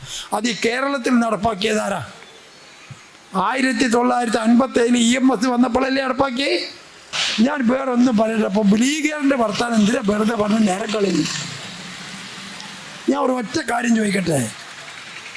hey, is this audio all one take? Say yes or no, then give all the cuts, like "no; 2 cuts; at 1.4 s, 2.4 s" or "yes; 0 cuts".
no; 1 cut; at 7.2 s